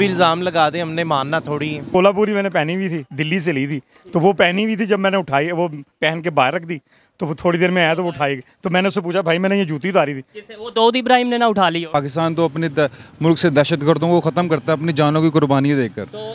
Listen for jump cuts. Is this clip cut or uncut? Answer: cut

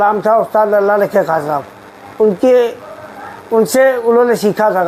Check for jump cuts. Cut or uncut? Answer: uncut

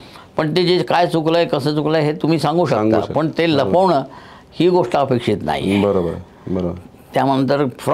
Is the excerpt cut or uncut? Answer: uncut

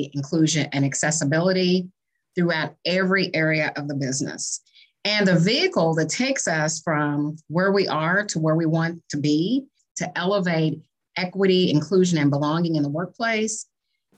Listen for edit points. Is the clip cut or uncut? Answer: cut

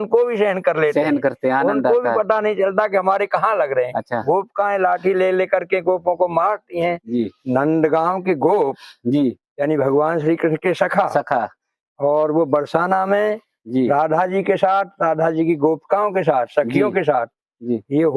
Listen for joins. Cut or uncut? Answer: cut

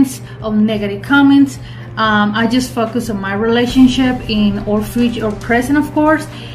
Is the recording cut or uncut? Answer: uncut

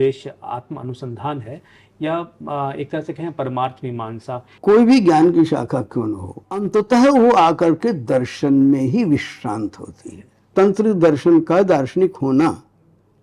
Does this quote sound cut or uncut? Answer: cut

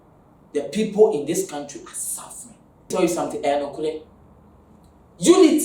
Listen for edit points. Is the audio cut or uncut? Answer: cut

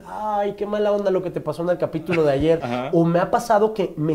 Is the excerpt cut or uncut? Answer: cut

